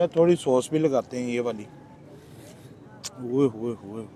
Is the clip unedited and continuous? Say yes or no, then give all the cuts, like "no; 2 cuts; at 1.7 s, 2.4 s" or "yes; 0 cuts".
no; 1 cut; at 2.0 s